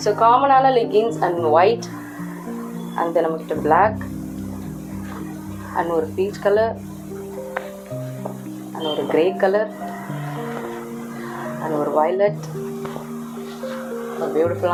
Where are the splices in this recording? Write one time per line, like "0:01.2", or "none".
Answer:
none